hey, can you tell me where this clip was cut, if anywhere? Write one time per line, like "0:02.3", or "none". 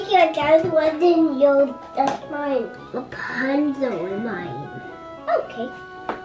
none